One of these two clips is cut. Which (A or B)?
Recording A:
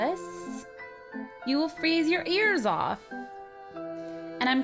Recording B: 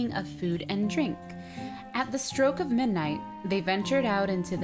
B